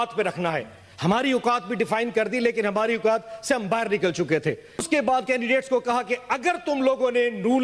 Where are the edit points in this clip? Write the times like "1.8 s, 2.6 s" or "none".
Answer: none